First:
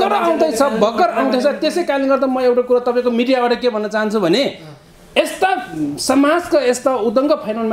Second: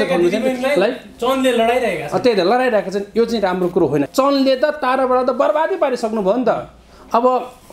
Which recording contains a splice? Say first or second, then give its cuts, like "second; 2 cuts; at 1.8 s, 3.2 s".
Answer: second; 1 cut; at 4.1 s